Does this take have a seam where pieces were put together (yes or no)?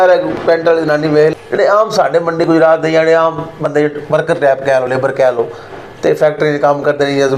yes